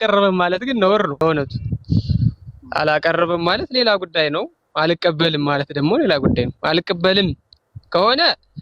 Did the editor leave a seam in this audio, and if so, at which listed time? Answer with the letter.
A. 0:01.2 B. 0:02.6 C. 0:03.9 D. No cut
A